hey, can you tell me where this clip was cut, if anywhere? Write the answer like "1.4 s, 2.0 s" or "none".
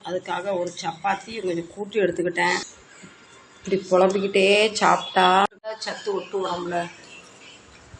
none